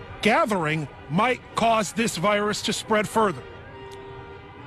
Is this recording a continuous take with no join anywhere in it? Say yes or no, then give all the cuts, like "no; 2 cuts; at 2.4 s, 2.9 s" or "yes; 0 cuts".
yes; 0 cuts